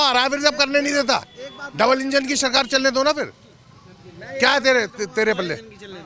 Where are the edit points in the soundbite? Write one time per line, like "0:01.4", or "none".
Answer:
none

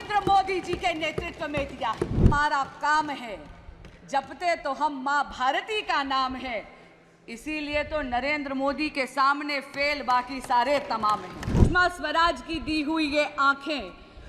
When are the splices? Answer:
0:02.3
0:11.6

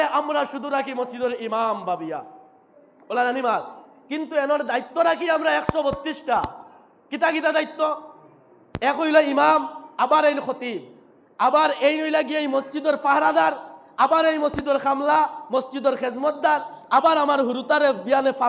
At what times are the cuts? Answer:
none

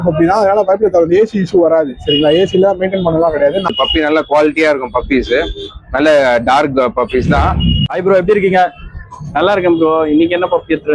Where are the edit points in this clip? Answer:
0:03.7
0:07.8

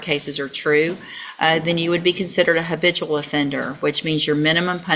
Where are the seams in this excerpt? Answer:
none

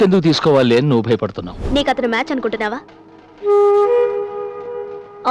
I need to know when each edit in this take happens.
0:01.6

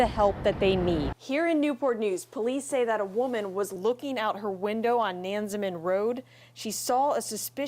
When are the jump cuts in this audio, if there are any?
0:01.2

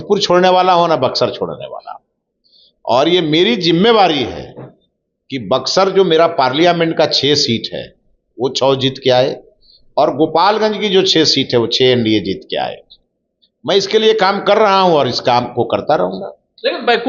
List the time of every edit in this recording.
none

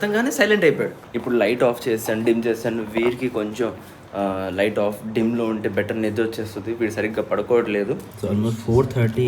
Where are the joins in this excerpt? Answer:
0:01.0
0:08.1

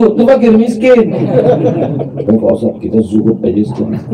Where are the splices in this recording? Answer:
0:02.2

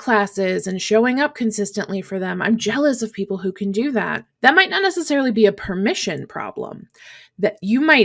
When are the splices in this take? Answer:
0:04.2

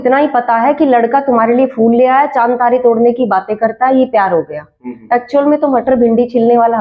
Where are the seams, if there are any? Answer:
none

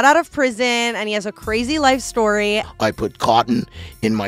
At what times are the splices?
0:02.6

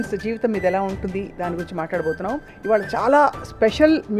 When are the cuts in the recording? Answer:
0:02.5

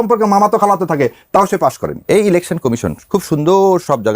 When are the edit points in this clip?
0:01.9

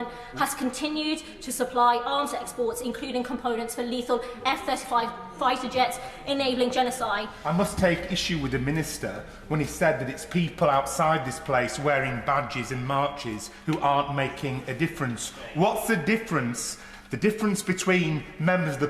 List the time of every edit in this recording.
0:07.3

